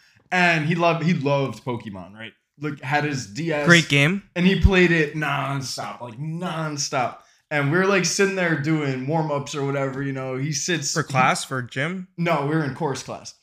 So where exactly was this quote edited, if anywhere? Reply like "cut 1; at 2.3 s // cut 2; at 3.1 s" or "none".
none

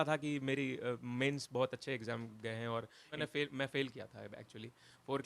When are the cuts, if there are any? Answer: cut 1; at 3.2 s

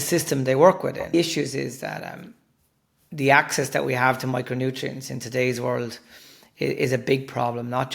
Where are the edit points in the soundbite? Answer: cut 1; at 1.1 s

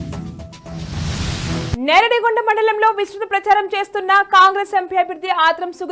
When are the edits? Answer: none

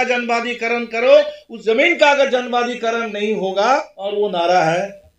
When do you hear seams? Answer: cut 1; at 3.9 s

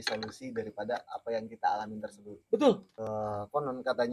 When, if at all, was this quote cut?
cut 1; at 2.9 s

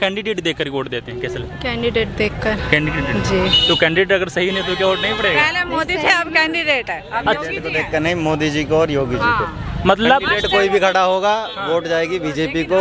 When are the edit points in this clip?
none

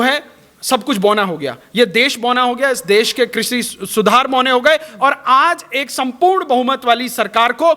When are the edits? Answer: none

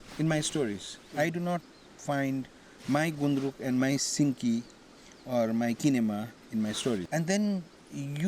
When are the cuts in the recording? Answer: cut 1; at 7.1 s

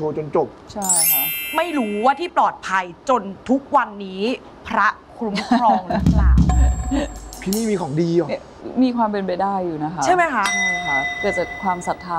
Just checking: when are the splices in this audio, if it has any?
none

